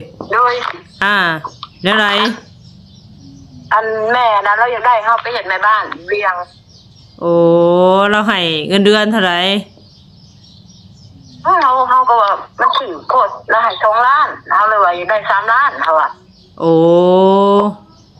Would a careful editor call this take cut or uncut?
uncut